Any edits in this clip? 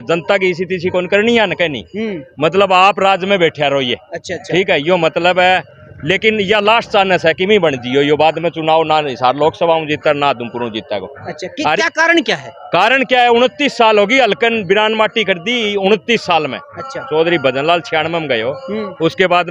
no; 0 cuts

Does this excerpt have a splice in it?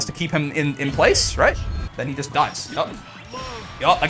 yes; 1 cut; at 2.6 s

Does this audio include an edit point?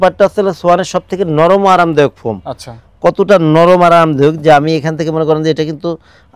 no; 0 cuts

